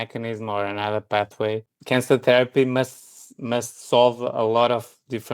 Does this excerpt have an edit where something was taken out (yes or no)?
yes